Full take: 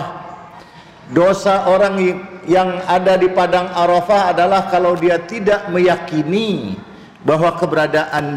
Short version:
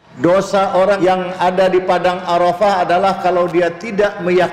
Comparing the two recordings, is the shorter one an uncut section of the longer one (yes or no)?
no